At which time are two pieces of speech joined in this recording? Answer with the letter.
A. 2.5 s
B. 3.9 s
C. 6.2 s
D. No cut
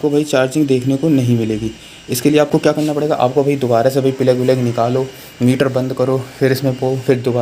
D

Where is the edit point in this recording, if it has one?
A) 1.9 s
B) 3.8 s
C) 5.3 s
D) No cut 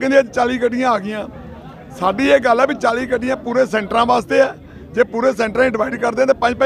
D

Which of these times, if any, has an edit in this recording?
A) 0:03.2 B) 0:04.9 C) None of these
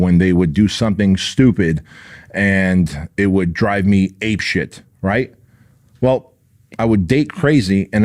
C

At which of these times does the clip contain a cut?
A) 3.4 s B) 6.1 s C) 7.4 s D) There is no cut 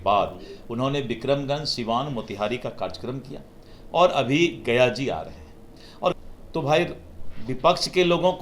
B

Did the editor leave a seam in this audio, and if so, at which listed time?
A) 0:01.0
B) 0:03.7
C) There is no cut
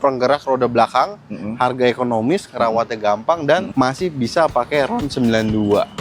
B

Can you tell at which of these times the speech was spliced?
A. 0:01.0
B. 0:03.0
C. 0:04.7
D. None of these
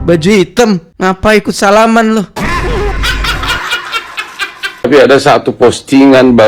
C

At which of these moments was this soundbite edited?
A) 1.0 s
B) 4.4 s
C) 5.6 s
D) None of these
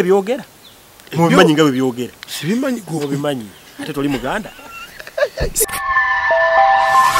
C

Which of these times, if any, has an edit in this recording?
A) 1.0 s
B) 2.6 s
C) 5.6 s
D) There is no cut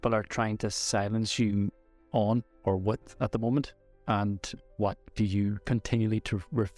C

